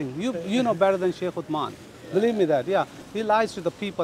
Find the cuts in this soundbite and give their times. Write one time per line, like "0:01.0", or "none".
0:03.0